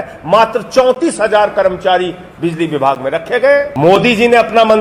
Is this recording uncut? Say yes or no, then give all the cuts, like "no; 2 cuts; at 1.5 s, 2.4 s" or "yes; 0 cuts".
no; 1 cut; at 3.7 s